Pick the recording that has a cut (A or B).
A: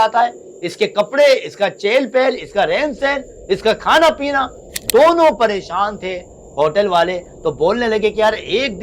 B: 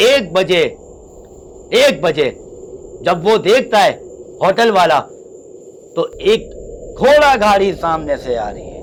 A